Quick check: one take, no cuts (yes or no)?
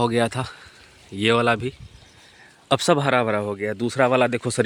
yes